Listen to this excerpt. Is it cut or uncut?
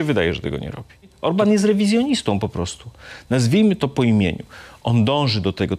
cut